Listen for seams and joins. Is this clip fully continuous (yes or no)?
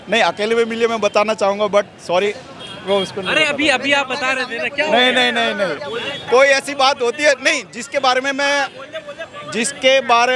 yes